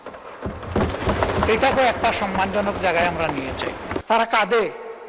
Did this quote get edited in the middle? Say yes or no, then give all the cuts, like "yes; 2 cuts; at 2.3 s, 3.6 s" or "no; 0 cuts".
yes; 1 cut; at 4.0 s